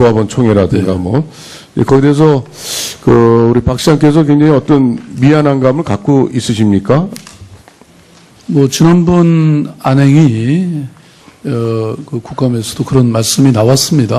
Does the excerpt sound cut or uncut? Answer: cut